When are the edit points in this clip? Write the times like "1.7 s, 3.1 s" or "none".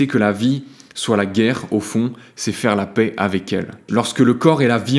3.8 s